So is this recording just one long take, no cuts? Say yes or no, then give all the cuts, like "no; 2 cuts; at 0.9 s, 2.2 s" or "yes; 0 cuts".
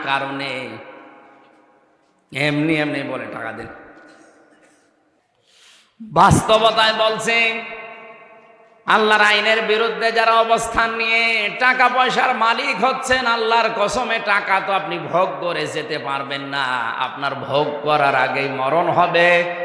no; 1 cut; at 5.2 s